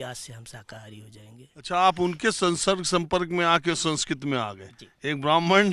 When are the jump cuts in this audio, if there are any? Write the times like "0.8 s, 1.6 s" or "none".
1.6 s